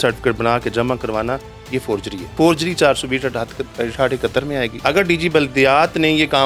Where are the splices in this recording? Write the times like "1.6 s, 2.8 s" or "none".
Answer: 2.2 s, 4.7 s